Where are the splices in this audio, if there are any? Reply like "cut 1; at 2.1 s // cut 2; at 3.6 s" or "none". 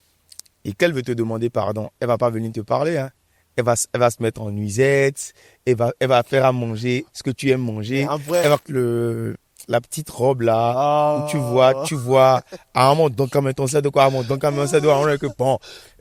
cut 1; at 8.6 s